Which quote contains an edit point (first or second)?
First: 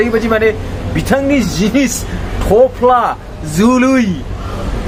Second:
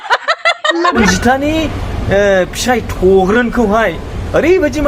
second